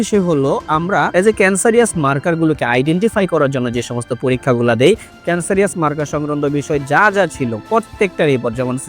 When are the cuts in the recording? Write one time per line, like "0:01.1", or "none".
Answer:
0:01.1